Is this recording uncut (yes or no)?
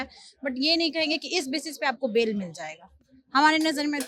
yes